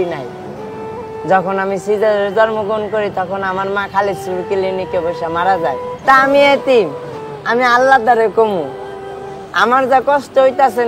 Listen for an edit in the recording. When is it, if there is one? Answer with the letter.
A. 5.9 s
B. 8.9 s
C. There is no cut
A